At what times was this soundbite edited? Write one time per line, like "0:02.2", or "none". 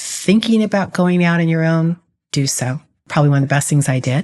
0:03.0